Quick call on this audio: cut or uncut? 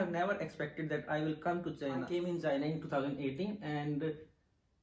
cut